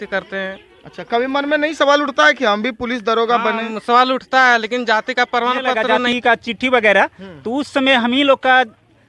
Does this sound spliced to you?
yes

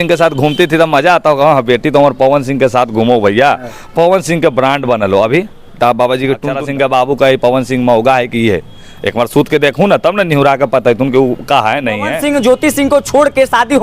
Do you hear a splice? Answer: yes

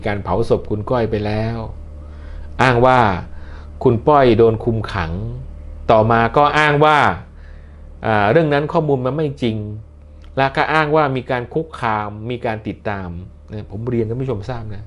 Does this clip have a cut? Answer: no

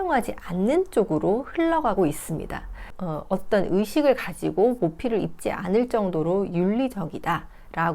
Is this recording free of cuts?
no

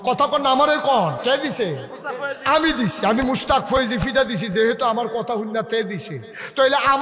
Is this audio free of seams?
no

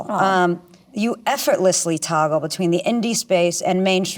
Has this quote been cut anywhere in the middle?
yes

